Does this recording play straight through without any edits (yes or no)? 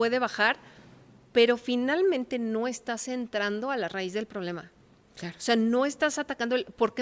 yes